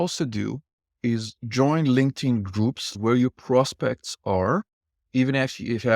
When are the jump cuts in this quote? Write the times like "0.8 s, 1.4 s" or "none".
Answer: 2.9 s, 5.0 s

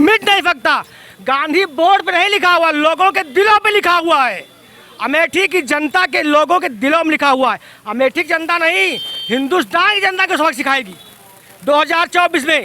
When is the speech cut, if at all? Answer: none

